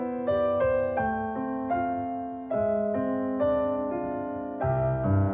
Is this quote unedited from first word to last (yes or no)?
yes